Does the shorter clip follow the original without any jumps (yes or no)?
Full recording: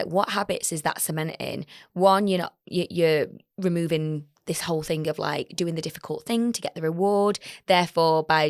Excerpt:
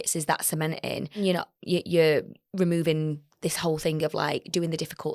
no